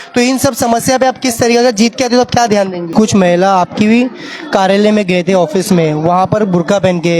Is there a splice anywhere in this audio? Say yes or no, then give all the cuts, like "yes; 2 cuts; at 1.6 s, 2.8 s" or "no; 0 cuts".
yes; 1 cut; at 2.9 s